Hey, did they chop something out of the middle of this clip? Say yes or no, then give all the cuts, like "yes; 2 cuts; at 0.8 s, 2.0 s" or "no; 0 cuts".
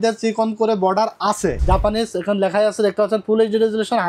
yes; 1 cut; at 1.6 s